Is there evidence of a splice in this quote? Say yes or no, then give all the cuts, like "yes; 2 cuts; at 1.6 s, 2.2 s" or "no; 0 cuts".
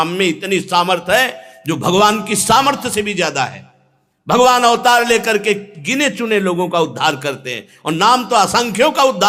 no; 0 cuts